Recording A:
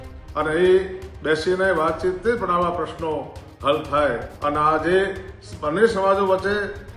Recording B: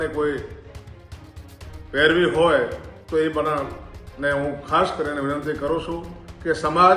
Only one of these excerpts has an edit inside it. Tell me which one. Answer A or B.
A